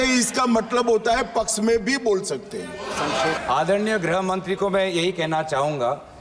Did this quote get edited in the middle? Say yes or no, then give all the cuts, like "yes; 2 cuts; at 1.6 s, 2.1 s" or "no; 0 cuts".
yes; 1 cut; at 3.4 s